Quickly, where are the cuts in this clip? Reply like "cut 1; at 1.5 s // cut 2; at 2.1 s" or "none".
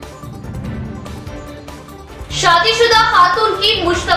cut 1; at 1.6 s